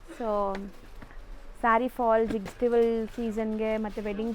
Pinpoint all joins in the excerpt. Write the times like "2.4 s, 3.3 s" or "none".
2.5 s